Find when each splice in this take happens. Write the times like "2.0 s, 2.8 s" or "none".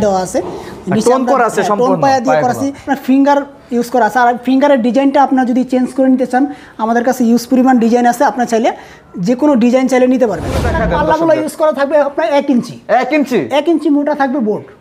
2.9 s, 10.7 s